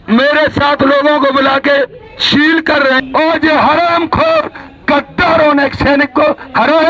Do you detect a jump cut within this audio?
yes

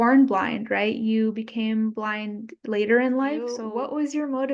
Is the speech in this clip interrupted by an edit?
yes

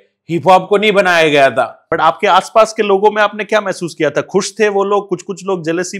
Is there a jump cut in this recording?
yes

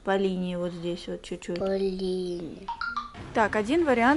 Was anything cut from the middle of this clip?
yes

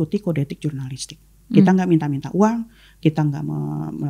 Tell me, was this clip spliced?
no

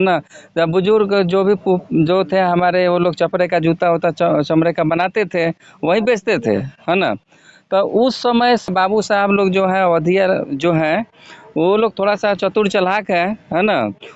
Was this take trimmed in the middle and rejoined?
yes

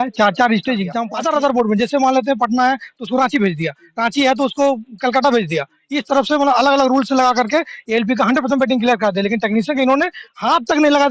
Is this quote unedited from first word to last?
no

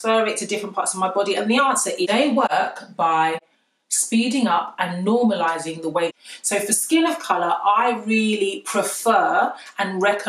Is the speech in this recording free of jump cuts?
no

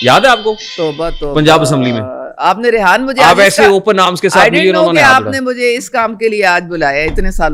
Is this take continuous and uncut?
yes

